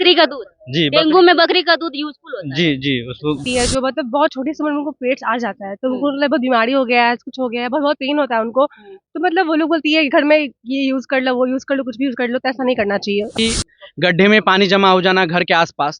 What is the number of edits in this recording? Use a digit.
2